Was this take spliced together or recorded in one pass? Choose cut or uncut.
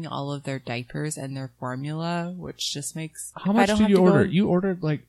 cut